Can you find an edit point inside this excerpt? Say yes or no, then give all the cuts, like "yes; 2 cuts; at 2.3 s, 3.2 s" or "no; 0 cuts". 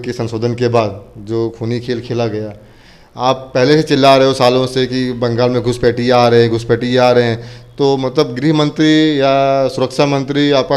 no; 0 cuts